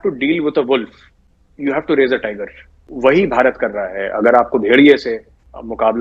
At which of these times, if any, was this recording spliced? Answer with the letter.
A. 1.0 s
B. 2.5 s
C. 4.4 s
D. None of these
D